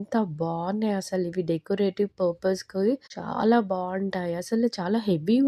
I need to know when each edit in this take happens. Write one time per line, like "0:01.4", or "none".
none